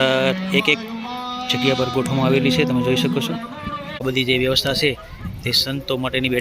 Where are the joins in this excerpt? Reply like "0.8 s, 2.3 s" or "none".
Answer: 4.0 s